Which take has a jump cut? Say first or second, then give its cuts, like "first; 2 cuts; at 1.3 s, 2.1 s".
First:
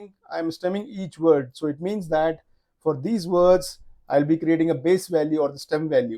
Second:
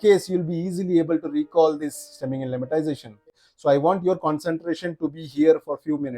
second; 1 cut; at 3.3 s